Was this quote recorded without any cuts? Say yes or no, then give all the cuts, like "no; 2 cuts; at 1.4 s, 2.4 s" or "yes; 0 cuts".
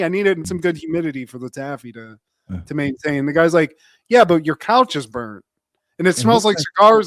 yes; 0 cuts